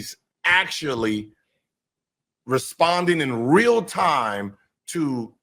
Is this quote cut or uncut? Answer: uncut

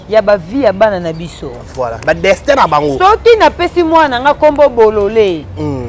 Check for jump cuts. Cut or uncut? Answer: uncut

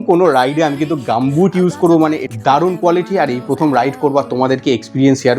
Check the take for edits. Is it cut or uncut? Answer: cut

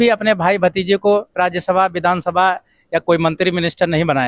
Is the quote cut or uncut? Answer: uncut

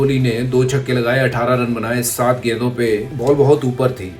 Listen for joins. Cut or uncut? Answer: cut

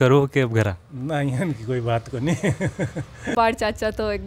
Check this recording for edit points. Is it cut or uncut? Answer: cut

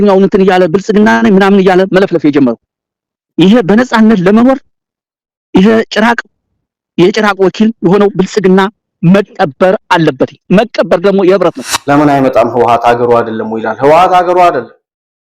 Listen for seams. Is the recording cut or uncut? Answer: cut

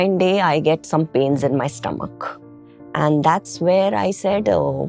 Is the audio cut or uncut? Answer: uncut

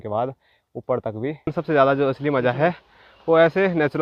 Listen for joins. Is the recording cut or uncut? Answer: cut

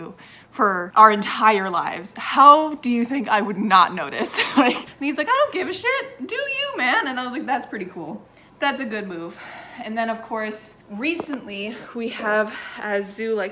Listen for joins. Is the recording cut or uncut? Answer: uncut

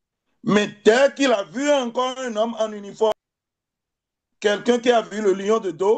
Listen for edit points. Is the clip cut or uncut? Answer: cut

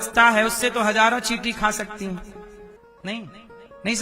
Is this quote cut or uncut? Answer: cut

